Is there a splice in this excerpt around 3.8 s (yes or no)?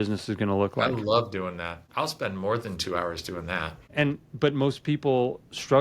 yes